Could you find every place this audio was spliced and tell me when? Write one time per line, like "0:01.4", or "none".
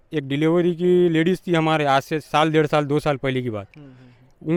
none